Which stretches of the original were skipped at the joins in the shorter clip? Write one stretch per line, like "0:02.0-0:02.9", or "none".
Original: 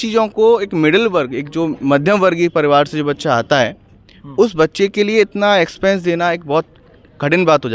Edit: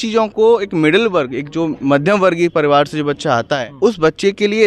0:03.6-0:04.2